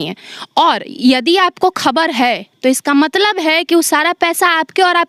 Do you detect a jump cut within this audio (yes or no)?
no